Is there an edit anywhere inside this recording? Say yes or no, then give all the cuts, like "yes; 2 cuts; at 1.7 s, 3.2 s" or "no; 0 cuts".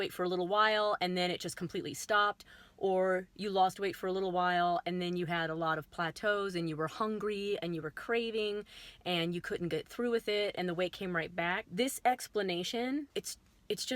yes; 2 cuts; at 11.7 s, 13.1 s